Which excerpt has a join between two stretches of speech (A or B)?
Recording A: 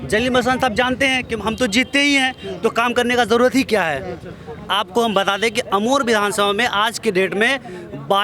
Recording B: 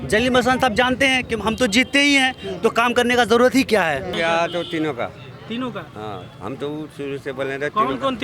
B